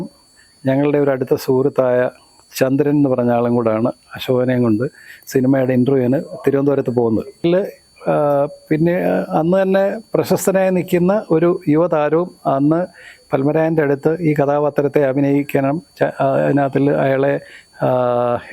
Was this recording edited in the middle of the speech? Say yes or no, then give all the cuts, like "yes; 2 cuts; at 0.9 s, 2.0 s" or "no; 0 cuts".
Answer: yes; 1 cut; at 7.4 s